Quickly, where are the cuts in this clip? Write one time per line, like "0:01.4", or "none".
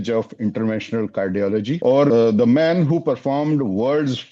0:02.0